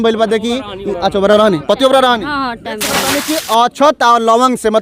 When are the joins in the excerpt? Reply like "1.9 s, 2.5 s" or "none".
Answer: 3.2 s